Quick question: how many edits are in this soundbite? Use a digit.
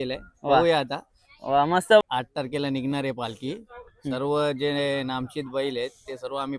1